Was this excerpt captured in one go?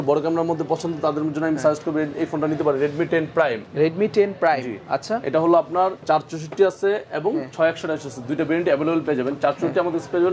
yes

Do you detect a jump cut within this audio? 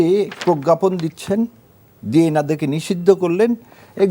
no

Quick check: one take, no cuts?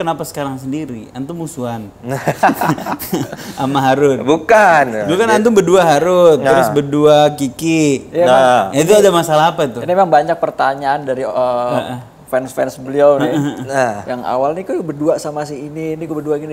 yes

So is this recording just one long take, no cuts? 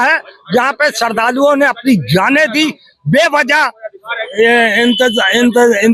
yes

